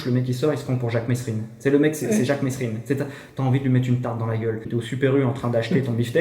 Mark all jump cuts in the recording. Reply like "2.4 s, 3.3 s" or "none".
4.7 s